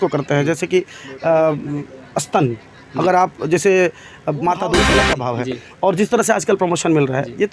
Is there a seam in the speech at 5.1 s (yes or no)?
yes